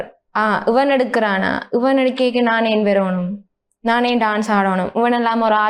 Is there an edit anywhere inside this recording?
no; 0 cuts

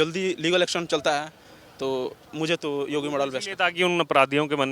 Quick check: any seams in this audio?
no; 0 cuts

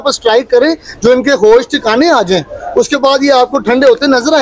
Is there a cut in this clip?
no; 0 cuts

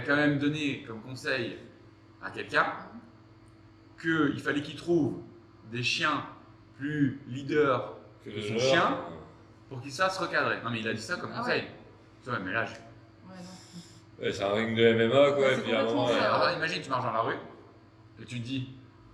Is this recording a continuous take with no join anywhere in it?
yes; 0 cuts

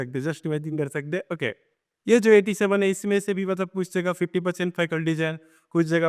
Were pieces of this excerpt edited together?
no; 0 cuts

